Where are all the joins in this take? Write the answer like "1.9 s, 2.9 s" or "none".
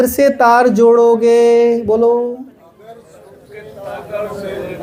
none